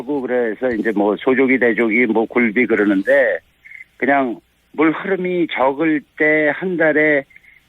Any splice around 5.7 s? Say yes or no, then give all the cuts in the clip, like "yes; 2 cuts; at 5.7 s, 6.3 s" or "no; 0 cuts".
yes; 1 cut; at 5.7 s